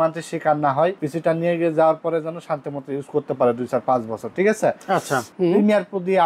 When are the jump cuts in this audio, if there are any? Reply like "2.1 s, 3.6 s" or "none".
1.0 s, 5.3 s